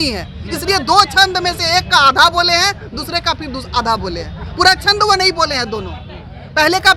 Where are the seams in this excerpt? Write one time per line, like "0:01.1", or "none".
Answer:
none